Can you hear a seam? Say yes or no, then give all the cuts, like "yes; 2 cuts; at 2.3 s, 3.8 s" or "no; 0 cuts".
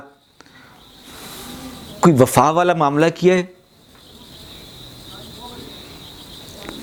no; 0 cuts